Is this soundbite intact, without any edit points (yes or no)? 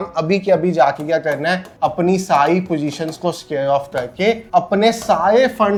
yes